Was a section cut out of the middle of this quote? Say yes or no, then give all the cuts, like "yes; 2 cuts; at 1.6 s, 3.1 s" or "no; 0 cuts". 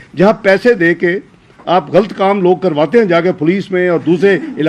no; 0 cuts